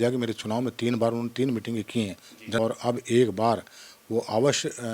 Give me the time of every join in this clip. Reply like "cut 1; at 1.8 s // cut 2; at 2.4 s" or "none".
cut 1; at 2.6 s